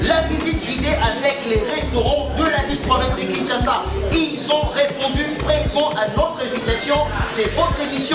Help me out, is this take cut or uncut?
uncut